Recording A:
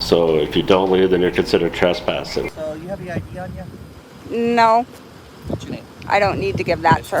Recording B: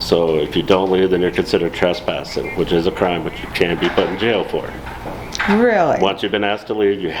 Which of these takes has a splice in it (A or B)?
A